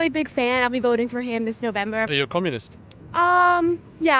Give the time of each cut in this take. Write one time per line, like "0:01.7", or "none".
0:02.1